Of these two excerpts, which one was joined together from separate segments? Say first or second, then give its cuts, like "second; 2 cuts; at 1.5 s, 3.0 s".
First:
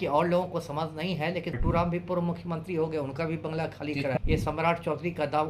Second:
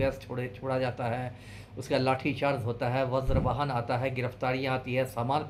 first; 2 cuts; at 1.6 s, 4.2 s